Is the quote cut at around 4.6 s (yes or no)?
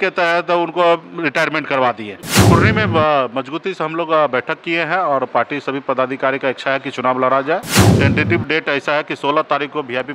no